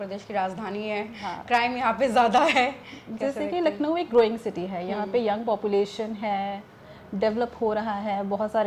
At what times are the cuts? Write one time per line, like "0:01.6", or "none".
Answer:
none